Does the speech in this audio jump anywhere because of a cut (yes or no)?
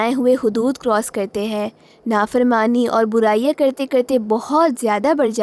no